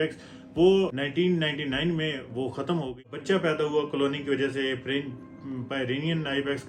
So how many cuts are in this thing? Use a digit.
1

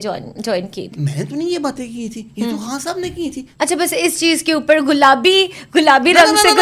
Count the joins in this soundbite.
2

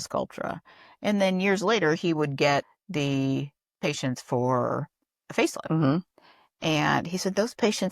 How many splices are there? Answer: 1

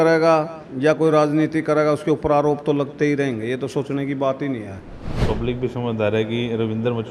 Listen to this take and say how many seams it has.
1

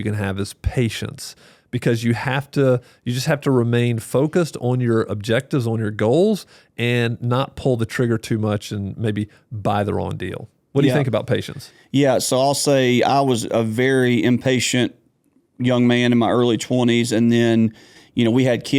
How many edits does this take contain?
0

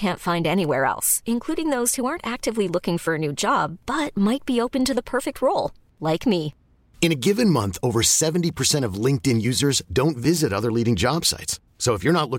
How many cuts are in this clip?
0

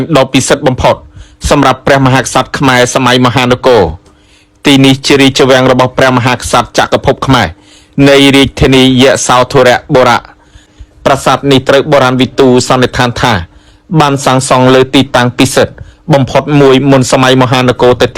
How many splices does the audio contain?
1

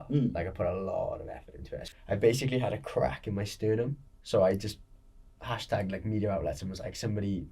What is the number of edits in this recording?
2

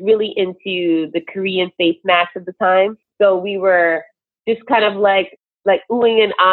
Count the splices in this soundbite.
1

